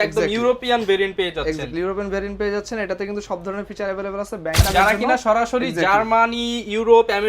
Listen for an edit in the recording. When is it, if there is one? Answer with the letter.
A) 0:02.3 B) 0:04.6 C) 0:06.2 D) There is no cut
B